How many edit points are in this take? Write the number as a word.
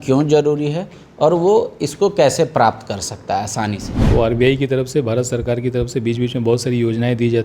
one